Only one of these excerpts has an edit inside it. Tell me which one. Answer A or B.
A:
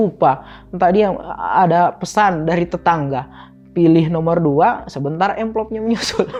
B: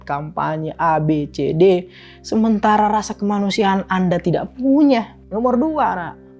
B